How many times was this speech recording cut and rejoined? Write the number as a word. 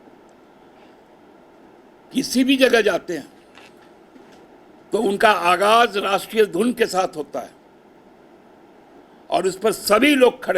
two